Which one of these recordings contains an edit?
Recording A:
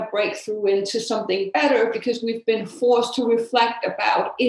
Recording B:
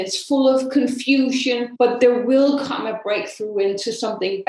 B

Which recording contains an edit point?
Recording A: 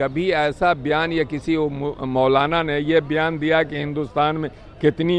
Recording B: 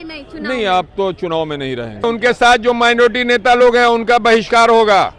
B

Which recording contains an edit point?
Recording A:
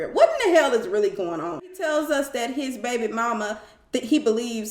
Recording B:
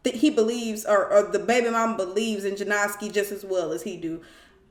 A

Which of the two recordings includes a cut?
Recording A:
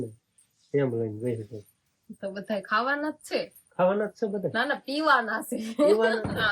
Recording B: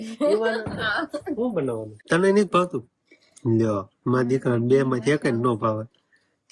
B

